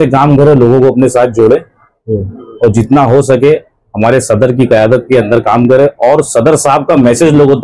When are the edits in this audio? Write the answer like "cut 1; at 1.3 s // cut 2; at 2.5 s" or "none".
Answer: none